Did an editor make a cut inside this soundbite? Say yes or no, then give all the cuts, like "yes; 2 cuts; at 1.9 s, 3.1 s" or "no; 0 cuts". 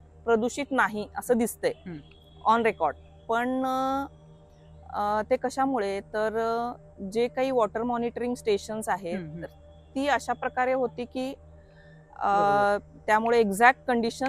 no; 0 cuts